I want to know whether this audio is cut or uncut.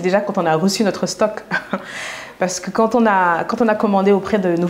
uncut